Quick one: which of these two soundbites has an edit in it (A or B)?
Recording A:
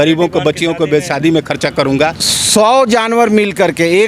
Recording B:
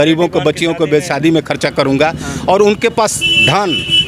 A